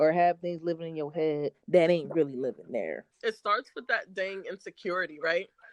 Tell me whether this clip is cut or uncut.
cut